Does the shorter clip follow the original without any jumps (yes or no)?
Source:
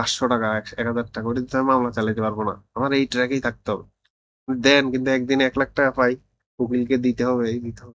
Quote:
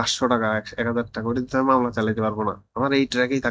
yes